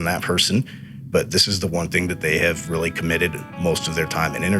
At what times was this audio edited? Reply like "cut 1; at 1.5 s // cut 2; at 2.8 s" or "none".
none